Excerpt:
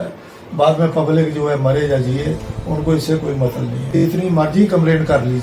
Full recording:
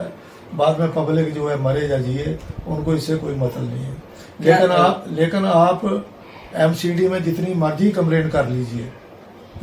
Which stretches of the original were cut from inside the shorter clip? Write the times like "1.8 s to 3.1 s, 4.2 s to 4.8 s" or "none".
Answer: 4.0 s to 7.2 s